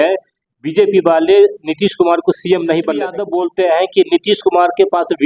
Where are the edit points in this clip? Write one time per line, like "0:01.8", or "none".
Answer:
0:03.2